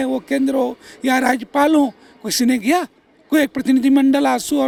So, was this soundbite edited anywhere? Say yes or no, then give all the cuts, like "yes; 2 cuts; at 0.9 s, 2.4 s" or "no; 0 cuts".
no; 0 cuts